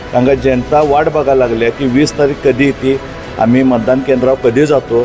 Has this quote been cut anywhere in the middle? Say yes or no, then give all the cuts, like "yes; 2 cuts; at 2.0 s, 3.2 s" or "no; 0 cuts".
no; 0 cuts